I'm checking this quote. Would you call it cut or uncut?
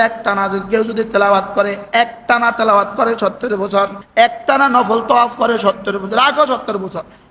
cut